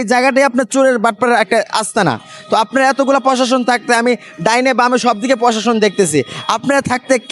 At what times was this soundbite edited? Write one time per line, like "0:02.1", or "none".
none